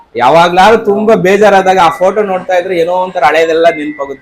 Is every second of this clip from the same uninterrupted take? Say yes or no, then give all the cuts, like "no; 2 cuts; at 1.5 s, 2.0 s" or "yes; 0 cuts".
yes; 0 cuts